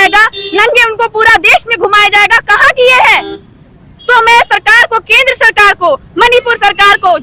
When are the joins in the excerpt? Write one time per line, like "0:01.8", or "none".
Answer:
none